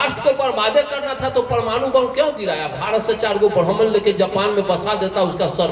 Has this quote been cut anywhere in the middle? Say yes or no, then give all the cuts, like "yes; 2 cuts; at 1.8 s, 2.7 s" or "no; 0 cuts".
no; 0 cuts